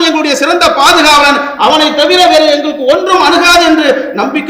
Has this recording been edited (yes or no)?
no